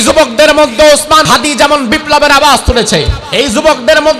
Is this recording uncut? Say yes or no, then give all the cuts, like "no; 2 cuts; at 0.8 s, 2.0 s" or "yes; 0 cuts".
no; 2 cuts; at 1.2 s, 3.2 s